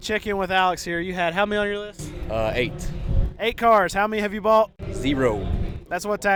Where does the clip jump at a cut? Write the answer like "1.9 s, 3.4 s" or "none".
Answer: none